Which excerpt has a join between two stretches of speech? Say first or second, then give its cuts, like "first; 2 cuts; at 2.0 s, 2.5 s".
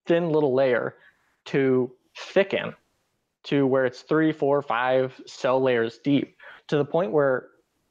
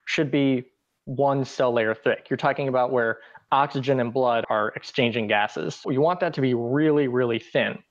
second; 2 cuts; at 4.4 s, 5.8 s